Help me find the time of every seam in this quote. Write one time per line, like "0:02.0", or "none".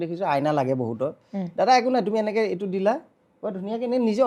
none